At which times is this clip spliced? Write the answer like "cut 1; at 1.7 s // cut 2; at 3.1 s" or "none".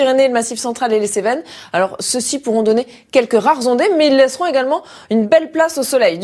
cut 1; at 4.4 s